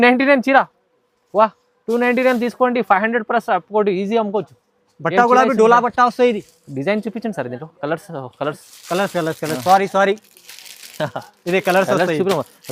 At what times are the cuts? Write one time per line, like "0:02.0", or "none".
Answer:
none